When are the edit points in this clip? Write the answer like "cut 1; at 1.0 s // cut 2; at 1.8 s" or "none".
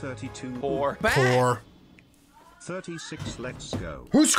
cut 1; at 1.0 s